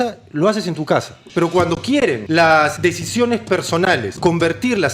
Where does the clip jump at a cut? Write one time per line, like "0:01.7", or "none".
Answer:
0:01.2
0:02.2
0:04.1

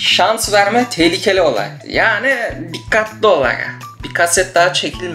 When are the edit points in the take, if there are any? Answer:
0:01.7

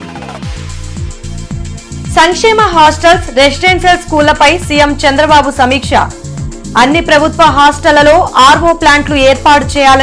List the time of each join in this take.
0:01.0
0:02.0

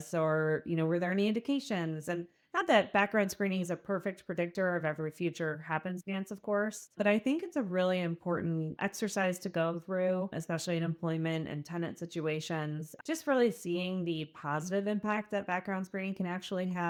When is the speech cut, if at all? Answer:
none

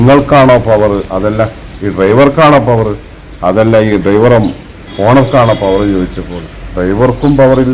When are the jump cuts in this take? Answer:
none

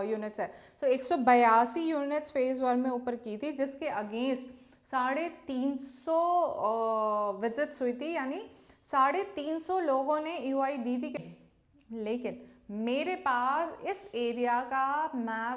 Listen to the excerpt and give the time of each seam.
0:11.1

